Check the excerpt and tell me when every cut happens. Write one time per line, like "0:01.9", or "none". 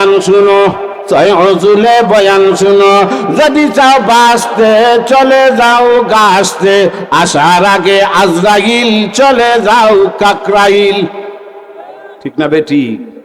0:00.9